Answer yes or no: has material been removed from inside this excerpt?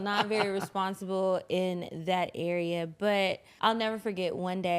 yes